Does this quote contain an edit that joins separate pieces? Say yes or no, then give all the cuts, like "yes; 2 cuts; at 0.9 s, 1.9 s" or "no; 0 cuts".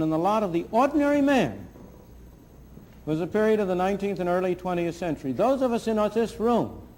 no; 0 cuts